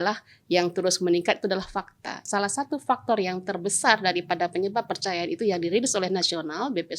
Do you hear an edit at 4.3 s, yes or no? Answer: no